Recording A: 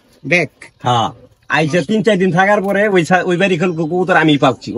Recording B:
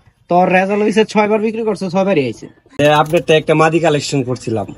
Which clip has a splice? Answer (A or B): B